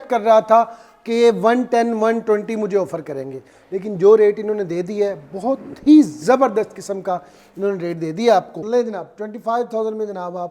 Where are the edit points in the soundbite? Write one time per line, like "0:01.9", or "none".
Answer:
0:08.6